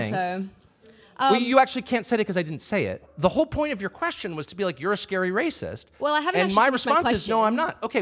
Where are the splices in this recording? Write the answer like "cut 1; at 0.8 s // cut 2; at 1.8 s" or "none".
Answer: cut 1; at 3.1 s